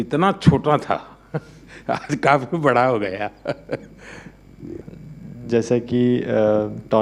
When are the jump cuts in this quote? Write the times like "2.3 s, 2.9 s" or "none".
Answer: none